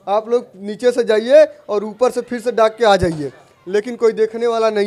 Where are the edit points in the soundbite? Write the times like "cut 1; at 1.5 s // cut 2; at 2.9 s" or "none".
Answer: none